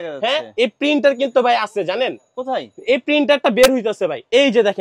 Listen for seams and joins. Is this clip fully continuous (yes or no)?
yes